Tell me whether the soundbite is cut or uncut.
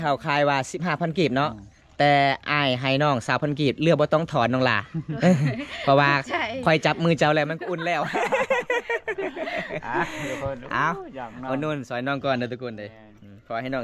uncut